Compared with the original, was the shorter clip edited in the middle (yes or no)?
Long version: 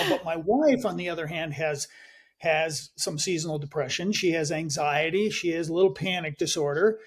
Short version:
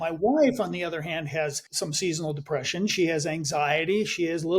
yes